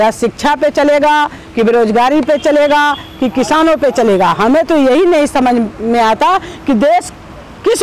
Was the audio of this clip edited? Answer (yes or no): no